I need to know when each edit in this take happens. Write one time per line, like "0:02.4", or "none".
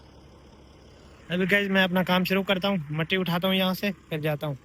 none

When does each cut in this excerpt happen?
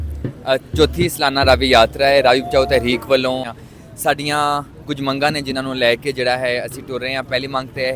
0:03.5

